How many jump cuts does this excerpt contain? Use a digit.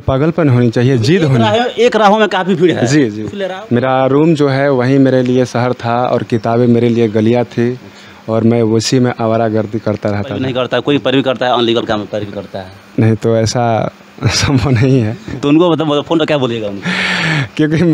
2